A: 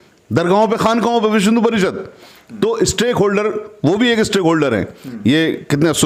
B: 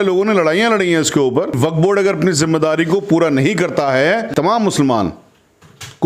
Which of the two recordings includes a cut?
B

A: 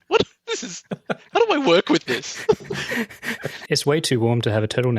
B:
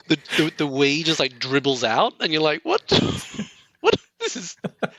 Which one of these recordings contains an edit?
A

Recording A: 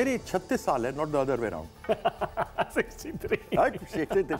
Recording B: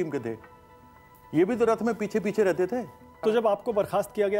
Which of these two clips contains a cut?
B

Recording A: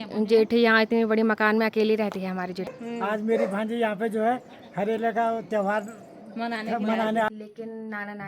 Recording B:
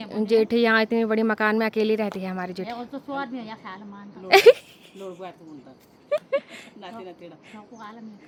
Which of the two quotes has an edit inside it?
A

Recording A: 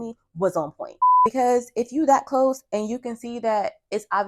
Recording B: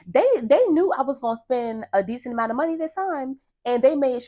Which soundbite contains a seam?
A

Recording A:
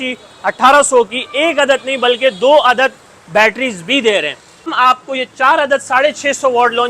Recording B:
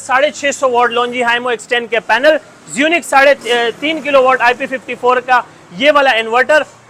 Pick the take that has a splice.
A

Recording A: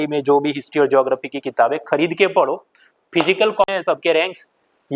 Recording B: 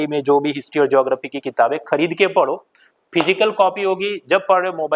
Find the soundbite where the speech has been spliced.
A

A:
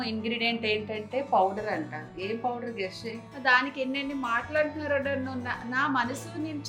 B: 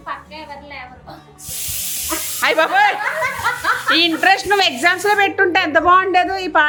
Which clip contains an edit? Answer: A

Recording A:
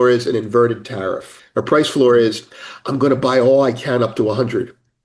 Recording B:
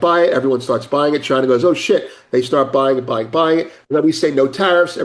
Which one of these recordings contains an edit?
A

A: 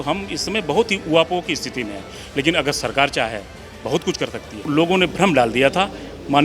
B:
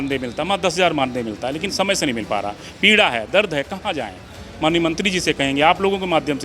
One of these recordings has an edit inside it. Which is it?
A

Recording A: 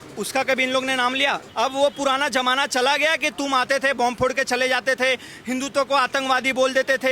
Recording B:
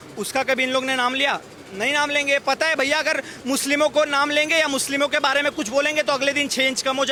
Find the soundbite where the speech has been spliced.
A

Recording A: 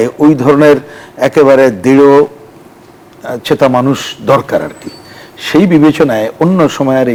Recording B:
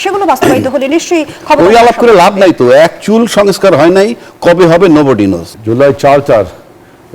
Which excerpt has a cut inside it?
B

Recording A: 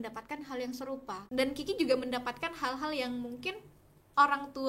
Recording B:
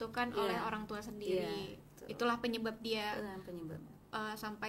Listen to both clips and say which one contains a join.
A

